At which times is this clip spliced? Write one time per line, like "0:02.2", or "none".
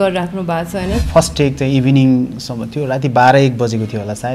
0:01.0